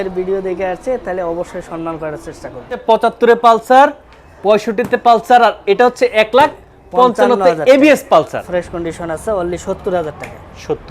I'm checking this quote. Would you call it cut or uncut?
cut